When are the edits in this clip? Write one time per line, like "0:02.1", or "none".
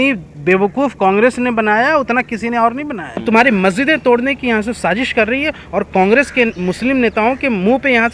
0:03.2